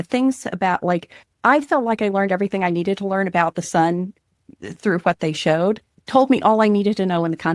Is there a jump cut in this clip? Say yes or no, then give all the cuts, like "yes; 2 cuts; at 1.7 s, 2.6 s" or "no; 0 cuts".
yes; 1 cut; at 5.9 s